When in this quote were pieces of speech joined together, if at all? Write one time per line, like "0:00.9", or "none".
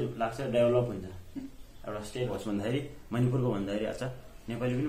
0:02.3